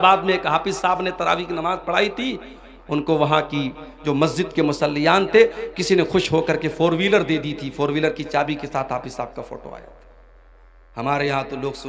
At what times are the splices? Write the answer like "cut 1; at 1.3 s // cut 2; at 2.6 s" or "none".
none